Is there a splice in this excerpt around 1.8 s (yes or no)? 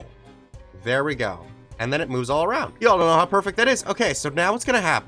no